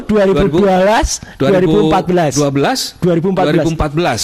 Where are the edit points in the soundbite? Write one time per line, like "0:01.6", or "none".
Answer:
none